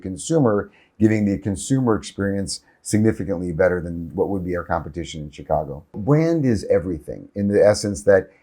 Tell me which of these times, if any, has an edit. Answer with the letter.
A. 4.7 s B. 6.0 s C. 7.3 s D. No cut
B